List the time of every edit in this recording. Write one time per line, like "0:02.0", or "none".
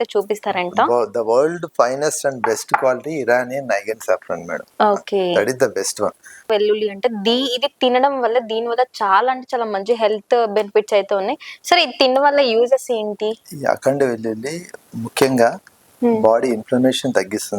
0:06.5